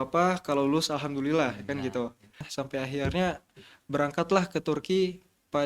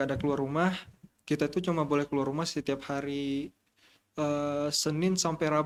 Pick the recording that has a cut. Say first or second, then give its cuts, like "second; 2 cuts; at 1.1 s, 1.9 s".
first; 1 cut; at 2.5 s